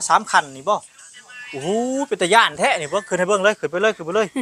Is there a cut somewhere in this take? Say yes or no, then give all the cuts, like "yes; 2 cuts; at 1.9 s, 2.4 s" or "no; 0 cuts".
no; 0 cuts